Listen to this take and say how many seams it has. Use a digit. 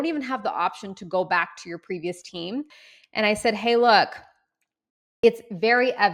1